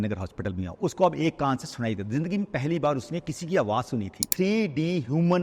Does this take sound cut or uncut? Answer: cut